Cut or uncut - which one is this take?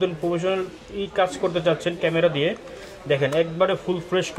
uncut